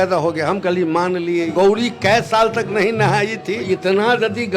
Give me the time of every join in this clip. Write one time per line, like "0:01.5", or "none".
0:01.5
0:03.6